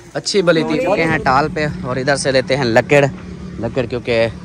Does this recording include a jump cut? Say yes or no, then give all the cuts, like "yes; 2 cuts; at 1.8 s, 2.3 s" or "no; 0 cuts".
yes; 1 cut; at 1.0 s